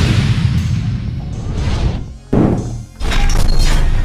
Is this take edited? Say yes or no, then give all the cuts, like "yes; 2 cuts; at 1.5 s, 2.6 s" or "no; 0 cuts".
yes; 1 cut; at 2.9 s